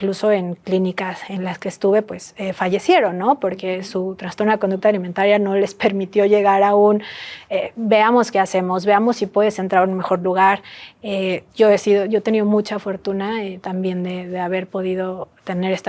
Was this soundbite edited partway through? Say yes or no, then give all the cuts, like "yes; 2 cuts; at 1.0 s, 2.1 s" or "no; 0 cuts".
no; 0 cuts